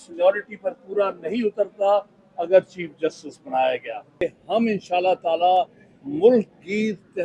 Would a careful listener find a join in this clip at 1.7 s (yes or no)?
no